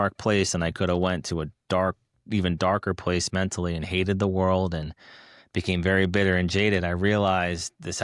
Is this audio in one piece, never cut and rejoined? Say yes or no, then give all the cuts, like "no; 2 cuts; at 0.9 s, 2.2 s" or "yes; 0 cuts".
yes; 0 cuts